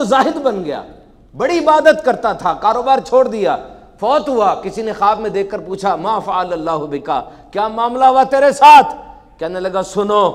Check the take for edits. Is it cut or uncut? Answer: uncut